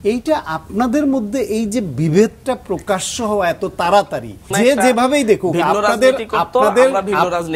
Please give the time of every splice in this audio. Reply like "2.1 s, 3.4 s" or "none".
4.5 s